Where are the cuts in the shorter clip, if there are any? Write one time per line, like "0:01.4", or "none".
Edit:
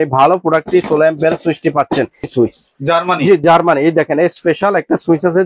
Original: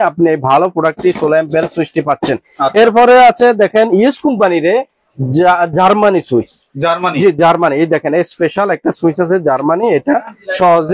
0:02.3

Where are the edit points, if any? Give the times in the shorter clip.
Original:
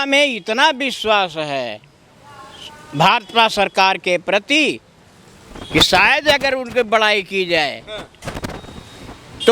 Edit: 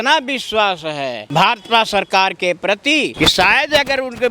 0:01.2
0:03.1

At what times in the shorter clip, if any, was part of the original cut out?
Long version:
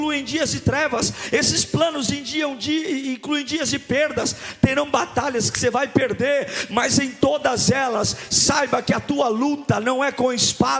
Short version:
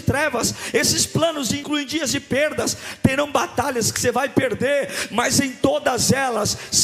0:01.6

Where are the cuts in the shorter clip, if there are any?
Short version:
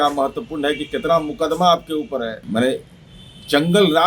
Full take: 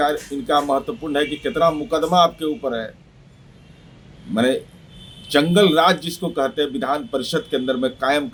0:02.4

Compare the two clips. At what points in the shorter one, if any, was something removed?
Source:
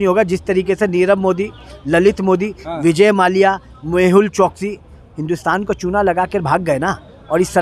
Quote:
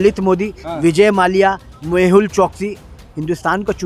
none

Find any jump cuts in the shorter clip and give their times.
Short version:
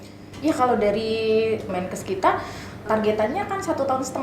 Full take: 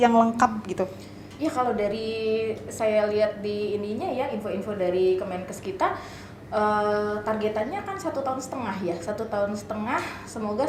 0:01.7
0:02.8

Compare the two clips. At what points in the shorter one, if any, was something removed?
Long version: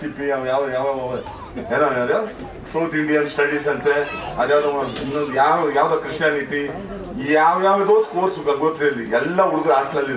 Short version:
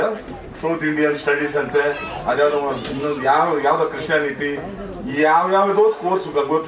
none

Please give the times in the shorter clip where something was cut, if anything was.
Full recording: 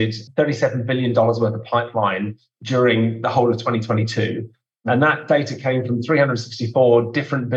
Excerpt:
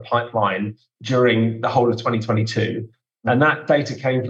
none

